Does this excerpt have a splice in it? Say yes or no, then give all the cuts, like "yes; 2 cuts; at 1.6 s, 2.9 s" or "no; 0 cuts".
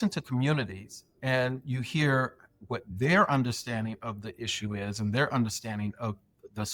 no; 0 cuts